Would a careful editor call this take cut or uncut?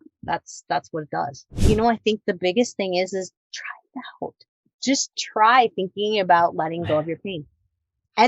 cut